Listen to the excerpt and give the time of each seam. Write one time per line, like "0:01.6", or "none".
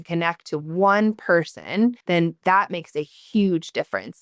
0:02.4